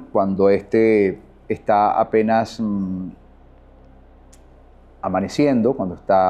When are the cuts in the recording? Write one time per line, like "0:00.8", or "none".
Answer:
none